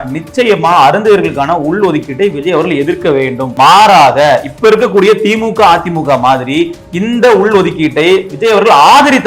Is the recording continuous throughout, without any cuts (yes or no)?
no